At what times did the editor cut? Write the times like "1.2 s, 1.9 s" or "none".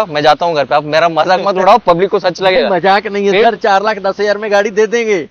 none